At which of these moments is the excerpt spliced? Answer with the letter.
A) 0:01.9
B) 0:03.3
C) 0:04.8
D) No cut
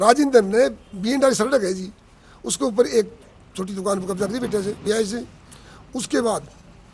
C